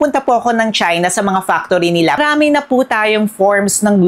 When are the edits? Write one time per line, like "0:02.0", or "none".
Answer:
0:02.2